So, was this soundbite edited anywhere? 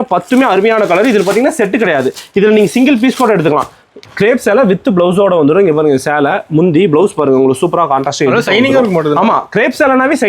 yes; 1 cut; at 3.9 s

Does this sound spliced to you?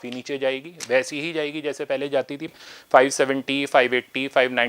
yes; 1 cut; at 2.5 s

